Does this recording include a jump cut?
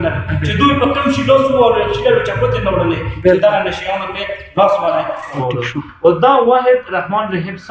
yes; 1 cut; at 5.3 s

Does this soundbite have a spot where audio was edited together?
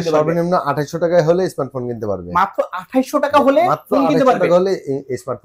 no; 0 cuts

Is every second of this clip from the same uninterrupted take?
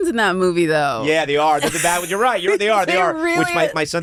yes; 0 cuts

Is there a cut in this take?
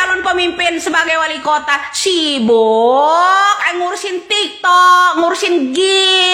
no; 0 cuts

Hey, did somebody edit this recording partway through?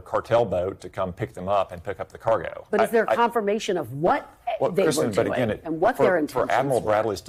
no; 0 cuts

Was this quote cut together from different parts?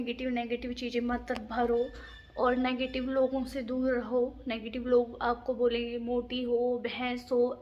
no; 0 cuts

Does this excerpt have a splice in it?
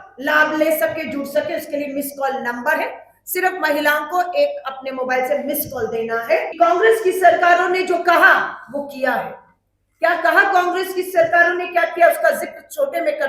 yes; 1 cut; at 6.5 s

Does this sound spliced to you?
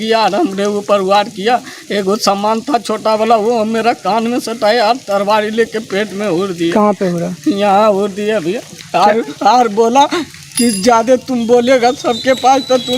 yes; 1 cut; at 8.7 s

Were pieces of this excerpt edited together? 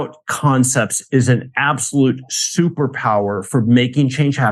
no; 0 cuts

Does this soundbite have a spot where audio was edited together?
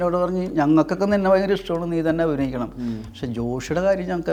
no; 0 cuts

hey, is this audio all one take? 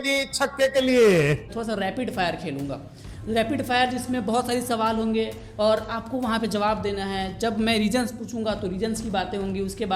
no; 1 cut; at 1.5 s

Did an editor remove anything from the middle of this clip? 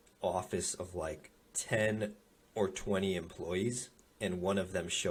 no; 0 cuts

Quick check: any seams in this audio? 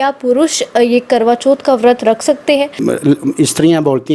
yes; 1 cut; at 2.8 s

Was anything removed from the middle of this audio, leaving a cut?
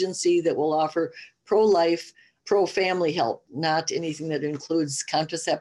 yes; 1 cut; at 3.4 s

